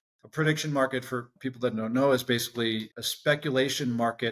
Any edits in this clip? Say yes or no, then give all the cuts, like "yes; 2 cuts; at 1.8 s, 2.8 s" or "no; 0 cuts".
yes; 2 cuts; at 1.3 s, 2.9 s